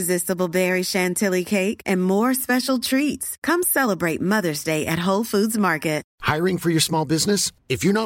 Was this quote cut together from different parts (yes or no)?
yes